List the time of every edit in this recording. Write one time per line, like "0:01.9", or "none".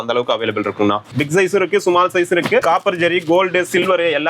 0:01.1
0:02.6